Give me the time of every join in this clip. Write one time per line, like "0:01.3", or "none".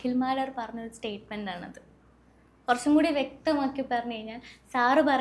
none

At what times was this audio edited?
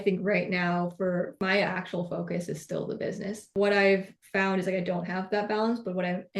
0:03.5

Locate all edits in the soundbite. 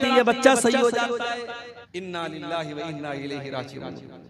0:01.7

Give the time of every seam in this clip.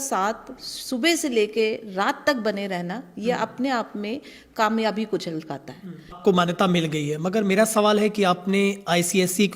0:06.2

